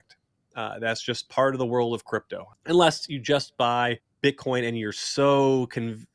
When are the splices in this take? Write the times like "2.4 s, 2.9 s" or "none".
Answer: 2.4 s, 4.1 s